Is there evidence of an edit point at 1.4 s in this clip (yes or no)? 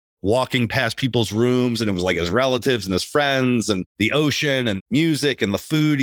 no